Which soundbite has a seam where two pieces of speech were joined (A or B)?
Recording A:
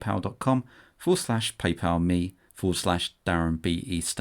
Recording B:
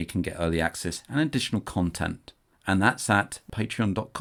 A